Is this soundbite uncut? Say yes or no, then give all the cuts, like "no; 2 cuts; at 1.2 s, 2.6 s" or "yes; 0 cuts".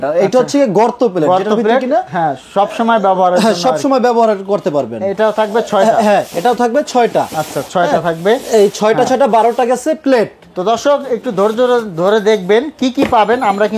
yes; 0 cuts